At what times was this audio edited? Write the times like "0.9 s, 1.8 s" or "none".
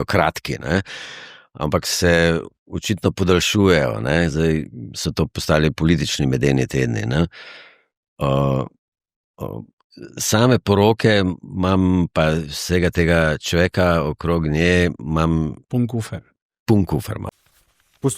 17.2 s

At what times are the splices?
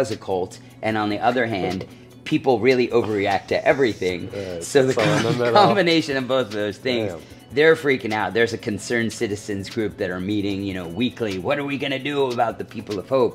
none

